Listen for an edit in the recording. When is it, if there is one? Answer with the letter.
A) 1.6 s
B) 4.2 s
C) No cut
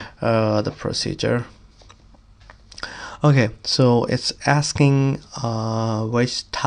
C